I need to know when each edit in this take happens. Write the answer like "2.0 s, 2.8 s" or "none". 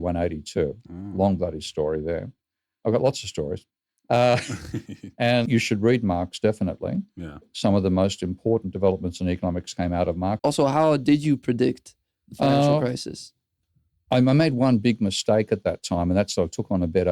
5.5 s, 10.4 s